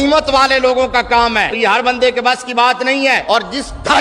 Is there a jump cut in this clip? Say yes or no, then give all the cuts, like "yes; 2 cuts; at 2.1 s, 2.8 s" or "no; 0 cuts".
yes; 2 cuts; at 1.6 s, 3.2 s